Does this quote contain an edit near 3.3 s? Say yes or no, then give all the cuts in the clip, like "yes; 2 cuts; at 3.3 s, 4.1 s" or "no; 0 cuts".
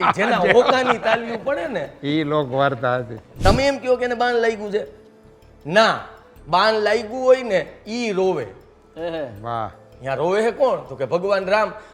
yes; 1 cut; at 3.3 s